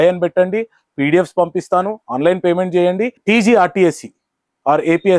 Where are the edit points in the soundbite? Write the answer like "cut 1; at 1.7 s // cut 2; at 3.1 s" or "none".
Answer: cut 1; at 3.2 s